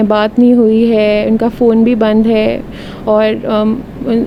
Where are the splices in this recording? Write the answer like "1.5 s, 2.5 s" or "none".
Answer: none

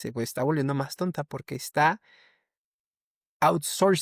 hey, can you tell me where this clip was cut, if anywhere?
none

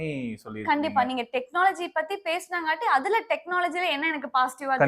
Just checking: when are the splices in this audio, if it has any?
none

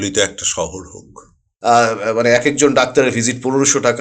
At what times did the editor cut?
1.5 s

